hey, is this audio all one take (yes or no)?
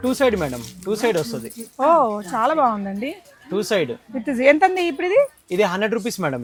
yes